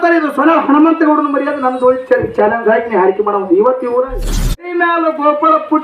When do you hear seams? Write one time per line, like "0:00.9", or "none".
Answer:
0:04.5